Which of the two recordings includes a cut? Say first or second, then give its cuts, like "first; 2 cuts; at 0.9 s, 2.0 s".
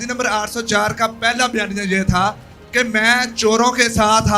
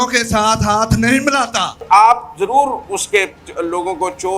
second; 1 cut; at 1.8 s